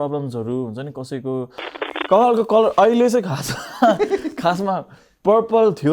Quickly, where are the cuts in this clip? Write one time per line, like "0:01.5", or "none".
0:01.8

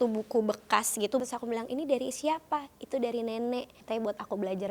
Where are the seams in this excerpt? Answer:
0:01.2
0:03.7

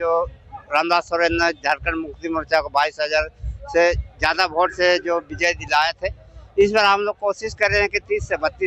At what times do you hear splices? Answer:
none

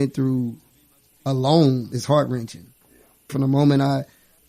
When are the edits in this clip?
0:03.3

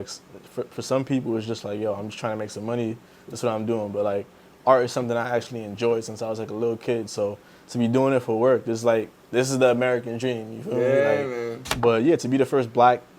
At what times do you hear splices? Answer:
0:11.6

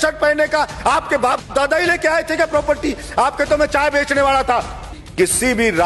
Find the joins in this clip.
0:05.0

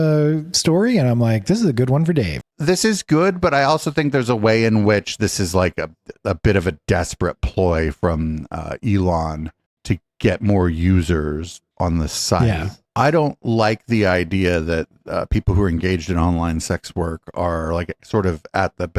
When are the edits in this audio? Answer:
0:02.4
0:12.8

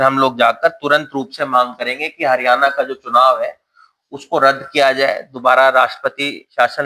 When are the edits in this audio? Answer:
none

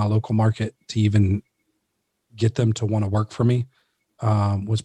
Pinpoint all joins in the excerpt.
none

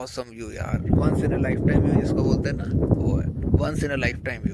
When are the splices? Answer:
none

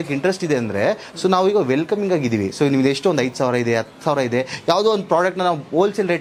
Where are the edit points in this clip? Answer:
none

